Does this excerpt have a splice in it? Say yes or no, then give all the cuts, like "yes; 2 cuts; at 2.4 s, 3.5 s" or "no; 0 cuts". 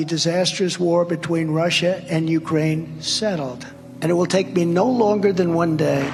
no; 0 cuts